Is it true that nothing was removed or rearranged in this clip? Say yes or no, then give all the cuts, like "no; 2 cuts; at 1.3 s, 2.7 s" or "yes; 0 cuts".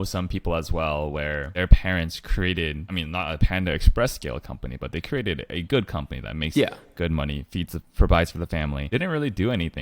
no; 3 cuts; at 1.5 s, 2.9 s, 8.8 s